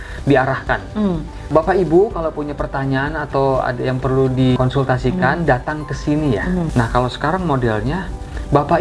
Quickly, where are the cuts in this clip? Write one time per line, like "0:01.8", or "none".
0:01.5
0:04.6
0:06.7